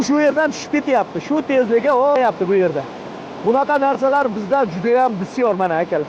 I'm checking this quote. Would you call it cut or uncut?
cut